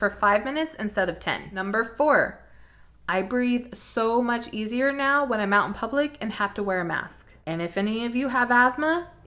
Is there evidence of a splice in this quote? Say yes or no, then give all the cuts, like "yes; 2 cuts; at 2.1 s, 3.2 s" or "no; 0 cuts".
no; 0 cuts